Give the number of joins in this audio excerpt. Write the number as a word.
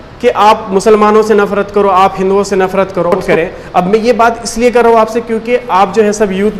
one